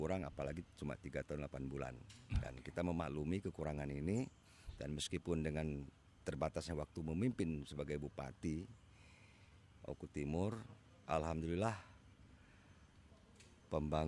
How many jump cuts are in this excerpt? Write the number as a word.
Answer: zero